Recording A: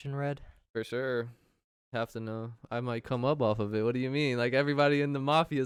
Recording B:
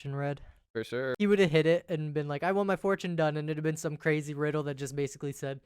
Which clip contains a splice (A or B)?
B